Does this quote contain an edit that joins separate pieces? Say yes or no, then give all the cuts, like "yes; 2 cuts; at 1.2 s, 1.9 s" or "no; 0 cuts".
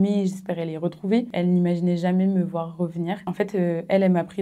yes; 2 cuts; at 1.3 s, 3.2 s